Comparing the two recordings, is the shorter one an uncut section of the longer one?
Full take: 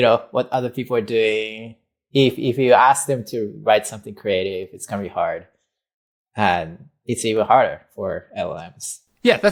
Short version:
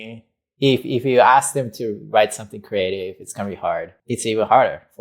no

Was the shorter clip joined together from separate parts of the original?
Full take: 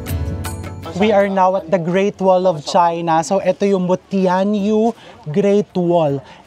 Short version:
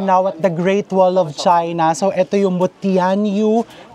no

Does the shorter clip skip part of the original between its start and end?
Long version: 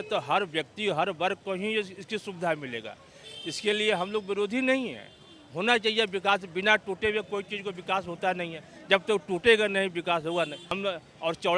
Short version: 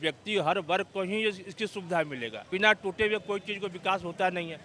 yes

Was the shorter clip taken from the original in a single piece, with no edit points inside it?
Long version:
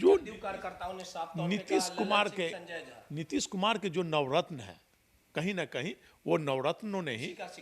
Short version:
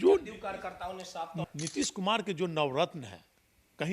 no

